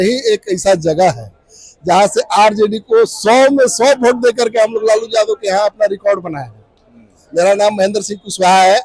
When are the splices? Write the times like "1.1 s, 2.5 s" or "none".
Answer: none